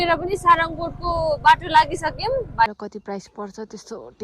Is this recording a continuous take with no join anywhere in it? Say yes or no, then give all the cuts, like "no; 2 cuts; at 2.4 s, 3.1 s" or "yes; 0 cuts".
no; 1 cut; at 2.7 s